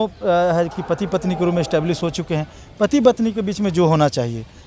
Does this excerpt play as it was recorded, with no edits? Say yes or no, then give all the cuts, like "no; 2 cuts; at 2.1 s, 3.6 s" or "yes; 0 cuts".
yes; 0 cuts